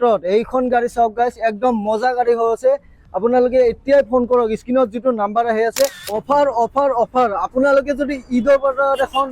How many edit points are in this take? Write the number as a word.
one